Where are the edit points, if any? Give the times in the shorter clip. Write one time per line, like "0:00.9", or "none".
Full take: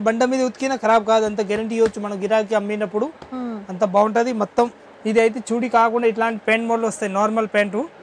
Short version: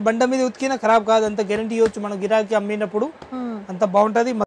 none